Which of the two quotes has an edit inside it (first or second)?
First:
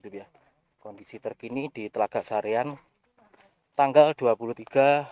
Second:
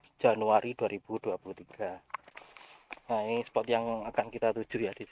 second